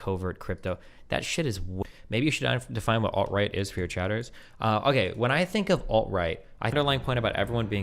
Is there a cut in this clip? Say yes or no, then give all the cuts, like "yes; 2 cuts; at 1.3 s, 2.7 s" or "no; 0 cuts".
yes; 2 cuts; at 1.8 s, 6.7 s